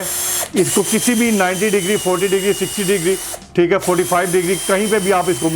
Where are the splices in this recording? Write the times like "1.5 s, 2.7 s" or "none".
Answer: none

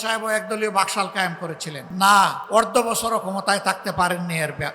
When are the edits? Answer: 1.8 s, 2.4 s

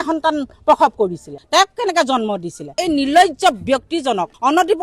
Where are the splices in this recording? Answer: 2.8 s

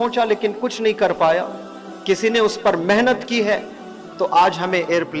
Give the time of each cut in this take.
none

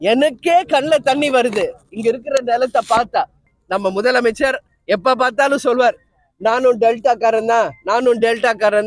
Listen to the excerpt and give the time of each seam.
3.5 s

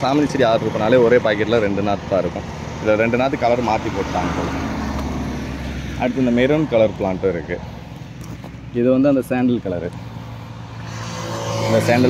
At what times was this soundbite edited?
none

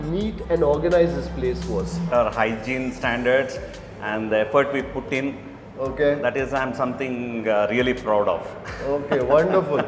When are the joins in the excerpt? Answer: none

